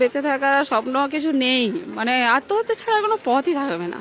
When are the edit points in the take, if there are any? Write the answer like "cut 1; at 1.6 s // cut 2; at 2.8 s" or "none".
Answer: none